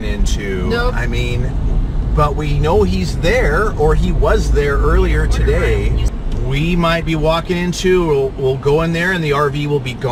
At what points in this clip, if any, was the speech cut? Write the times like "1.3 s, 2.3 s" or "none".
none